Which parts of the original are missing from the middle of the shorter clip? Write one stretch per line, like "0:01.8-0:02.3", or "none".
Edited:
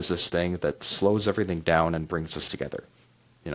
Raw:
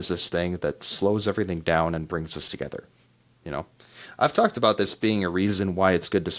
none